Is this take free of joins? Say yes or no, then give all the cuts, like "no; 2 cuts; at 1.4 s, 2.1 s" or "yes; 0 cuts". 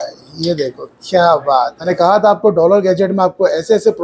no; 1 cut; at 1.8 s